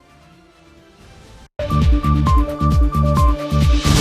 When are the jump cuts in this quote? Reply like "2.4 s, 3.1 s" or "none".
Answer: 1.5 s